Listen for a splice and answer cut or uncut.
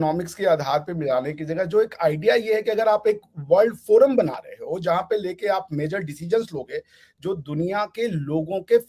uncut